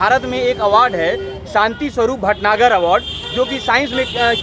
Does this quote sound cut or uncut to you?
uncut